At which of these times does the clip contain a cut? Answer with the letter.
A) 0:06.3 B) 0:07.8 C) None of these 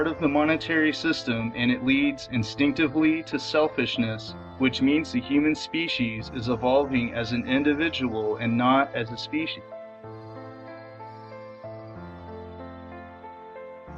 A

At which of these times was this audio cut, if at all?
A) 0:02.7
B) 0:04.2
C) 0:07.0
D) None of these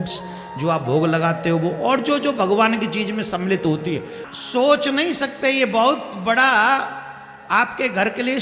B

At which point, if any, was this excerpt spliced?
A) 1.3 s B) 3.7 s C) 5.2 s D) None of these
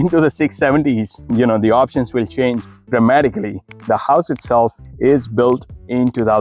B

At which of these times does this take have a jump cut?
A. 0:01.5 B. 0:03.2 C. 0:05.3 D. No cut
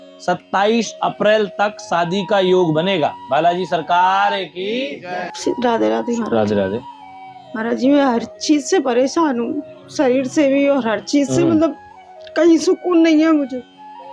C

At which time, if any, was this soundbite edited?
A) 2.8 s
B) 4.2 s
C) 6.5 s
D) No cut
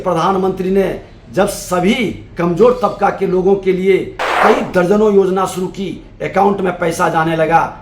B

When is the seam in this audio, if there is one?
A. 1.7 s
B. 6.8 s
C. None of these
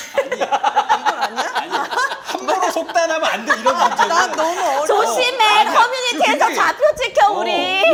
C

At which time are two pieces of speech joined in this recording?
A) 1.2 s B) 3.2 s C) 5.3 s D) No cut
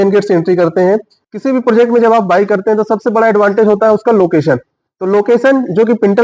A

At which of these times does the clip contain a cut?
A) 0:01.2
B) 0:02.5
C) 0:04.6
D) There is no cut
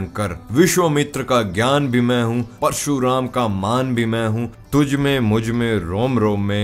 C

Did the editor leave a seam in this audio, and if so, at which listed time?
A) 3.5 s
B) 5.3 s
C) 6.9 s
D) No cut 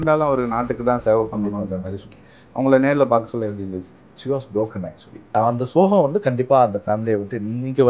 B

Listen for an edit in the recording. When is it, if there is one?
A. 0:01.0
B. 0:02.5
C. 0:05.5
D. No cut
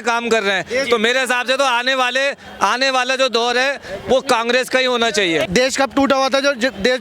C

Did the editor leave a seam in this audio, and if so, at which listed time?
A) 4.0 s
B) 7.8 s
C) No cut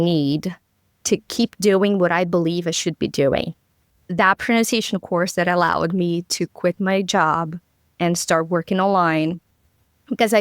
A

